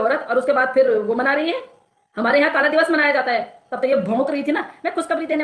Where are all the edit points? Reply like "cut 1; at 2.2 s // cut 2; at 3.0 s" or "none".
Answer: cut 1; at 3.6 s